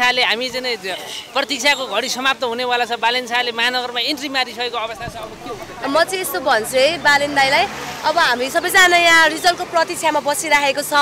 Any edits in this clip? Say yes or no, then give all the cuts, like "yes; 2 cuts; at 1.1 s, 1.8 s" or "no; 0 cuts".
no; 0 cuts